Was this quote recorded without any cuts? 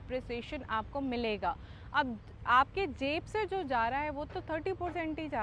yes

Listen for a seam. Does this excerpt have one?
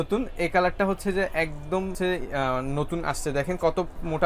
no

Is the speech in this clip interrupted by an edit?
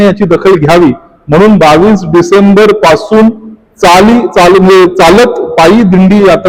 no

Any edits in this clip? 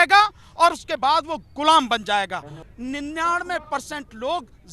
yes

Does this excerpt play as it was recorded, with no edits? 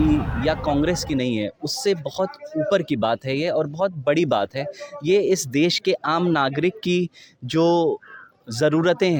yes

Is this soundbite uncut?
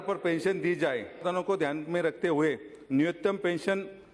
no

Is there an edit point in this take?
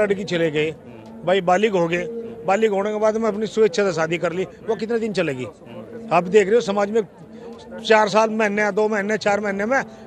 no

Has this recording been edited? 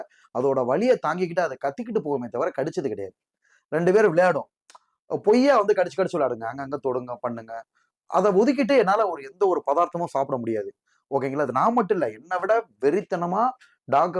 no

